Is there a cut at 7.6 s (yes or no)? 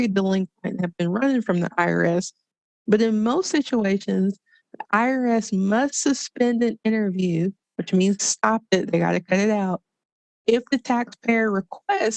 no